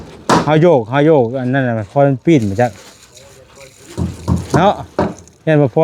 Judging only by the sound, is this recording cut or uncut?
uncut